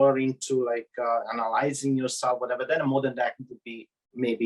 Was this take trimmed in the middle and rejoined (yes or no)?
no